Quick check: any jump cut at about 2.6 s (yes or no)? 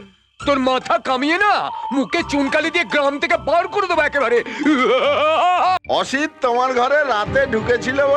no